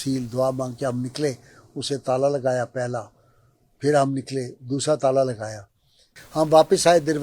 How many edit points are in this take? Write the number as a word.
one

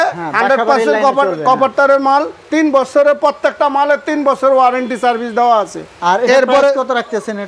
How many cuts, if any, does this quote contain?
zero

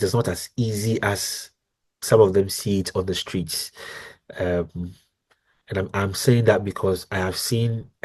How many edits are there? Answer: zero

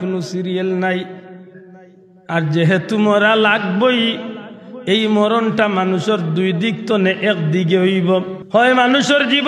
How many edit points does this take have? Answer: one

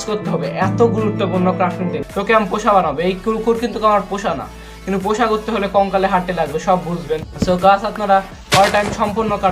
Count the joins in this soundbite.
two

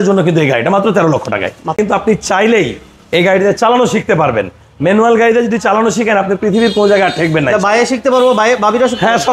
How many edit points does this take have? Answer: one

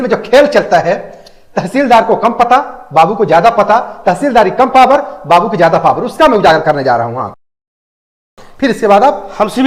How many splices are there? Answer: zero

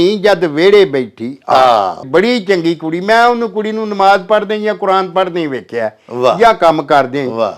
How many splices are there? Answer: one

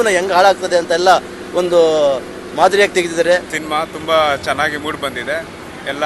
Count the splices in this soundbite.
one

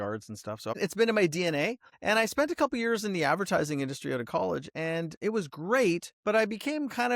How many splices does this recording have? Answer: four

